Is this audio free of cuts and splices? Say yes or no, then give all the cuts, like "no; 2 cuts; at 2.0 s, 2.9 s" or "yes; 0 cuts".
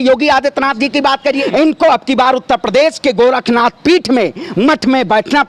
no; 1 cut; at 1.4 s